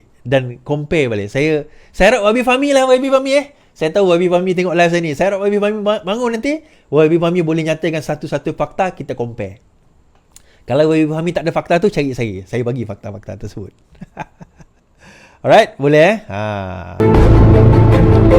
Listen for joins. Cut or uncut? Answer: cut